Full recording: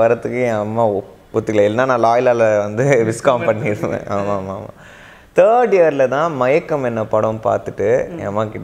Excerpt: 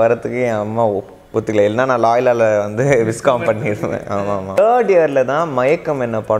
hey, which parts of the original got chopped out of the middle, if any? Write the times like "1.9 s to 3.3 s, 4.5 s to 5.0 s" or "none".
4.6 s to 5.4 s